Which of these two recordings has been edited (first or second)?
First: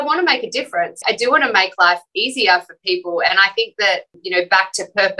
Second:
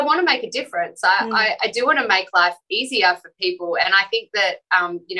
first